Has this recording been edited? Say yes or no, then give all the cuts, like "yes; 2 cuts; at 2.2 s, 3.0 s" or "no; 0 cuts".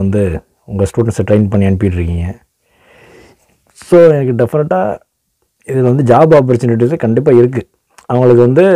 no; 0 cuts